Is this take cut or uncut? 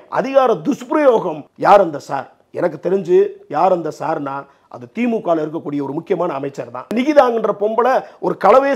cut